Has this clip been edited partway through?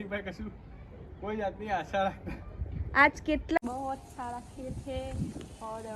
yes; 1 cut; at 3.6 s

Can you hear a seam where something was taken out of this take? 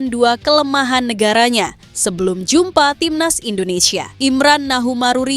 yes; 1 cut; at 4.1 s

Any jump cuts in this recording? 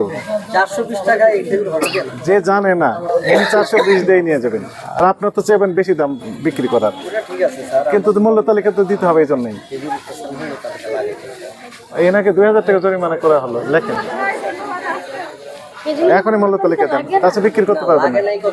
no; 0 cuts

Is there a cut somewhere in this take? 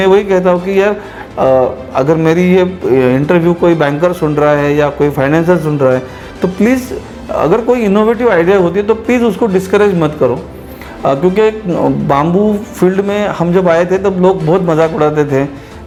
no; 0 cuts

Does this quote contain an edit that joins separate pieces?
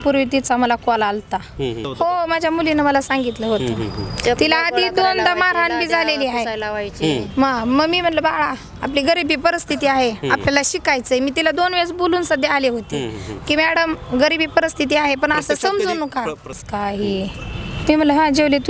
yes; 2 cuts; at 1.9 s, 16.6 s

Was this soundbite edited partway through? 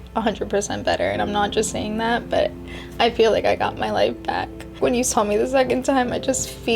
yes; 1 cut; at 4.8 s

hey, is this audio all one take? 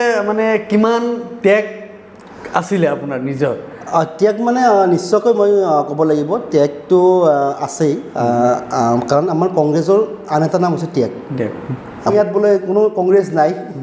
no; 1 cut; at 12.1 s

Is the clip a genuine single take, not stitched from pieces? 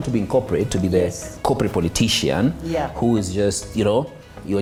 yes; 0 cuts

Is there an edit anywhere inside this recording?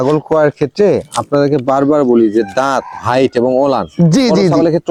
no; 0 cuts

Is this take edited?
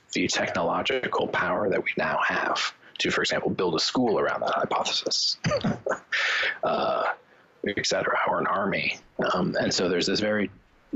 no; 0 cuts

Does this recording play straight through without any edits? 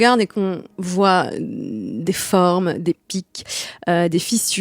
yes; 0 cuts

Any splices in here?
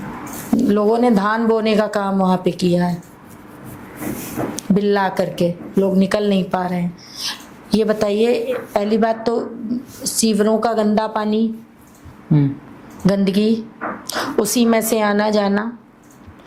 no; 0 cuts

